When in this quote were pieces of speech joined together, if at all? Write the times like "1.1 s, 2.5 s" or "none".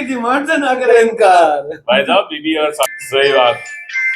3.0 s